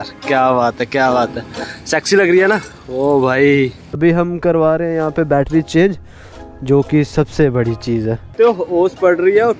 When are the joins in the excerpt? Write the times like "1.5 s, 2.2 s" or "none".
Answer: 4.0 s, 8.2 s